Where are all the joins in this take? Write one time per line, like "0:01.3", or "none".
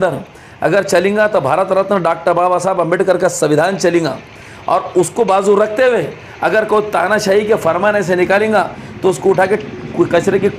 none